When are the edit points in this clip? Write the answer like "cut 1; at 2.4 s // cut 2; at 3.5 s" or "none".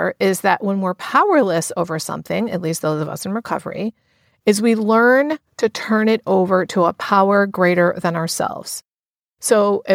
none